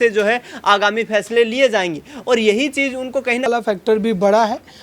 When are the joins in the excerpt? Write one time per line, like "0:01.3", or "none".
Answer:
0:03.5

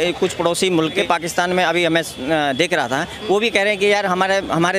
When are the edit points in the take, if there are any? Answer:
0:01.0

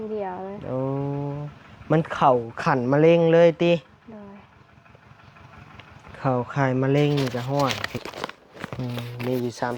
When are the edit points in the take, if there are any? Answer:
0:07.8

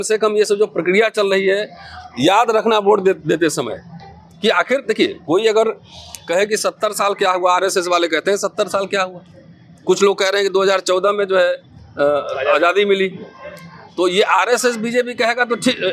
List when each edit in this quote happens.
none

